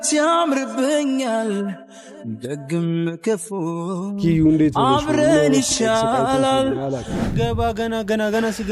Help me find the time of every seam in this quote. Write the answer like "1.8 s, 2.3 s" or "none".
7.2 s